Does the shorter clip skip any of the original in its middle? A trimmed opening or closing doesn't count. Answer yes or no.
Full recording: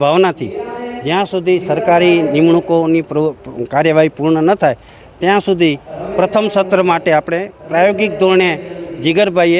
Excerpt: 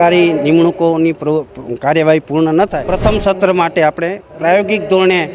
yes